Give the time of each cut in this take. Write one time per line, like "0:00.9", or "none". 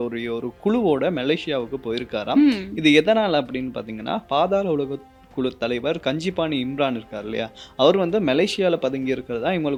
none